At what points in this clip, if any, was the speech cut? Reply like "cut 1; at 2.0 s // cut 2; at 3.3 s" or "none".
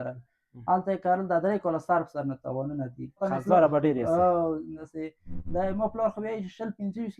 cut 1; at 3.2 s // cut 2; at 4.8 s